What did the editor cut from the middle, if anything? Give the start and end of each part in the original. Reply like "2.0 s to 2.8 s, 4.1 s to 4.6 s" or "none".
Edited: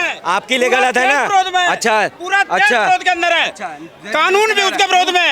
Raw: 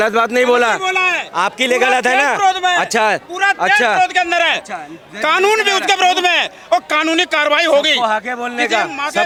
none

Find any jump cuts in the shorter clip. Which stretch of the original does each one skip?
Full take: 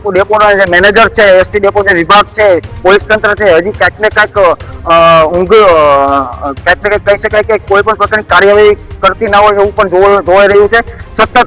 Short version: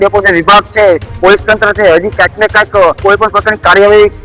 4.6 s to 7.6 s

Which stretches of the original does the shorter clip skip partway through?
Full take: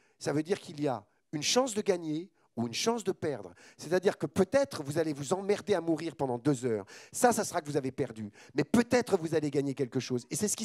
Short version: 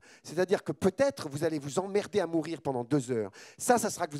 none

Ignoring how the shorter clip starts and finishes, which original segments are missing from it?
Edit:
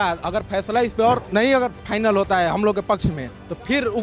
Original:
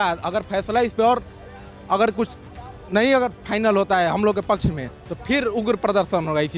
1.2 s to 2.8 s

